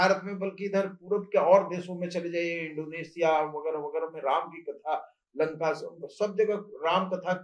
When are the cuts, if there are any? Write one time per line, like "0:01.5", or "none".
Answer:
none